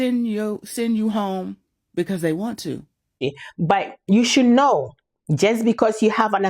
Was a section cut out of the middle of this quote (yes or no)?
yes